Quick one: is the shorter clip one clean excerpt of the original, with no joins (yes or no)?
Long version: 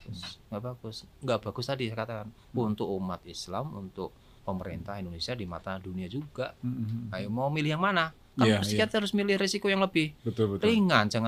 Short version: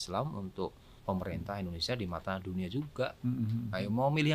yes